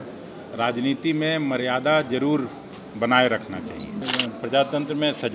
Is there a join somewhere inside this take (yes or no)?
yes